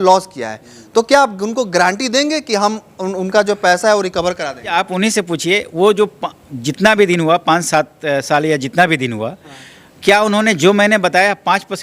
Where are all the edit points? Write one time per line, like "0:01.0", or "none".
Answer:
0:04.7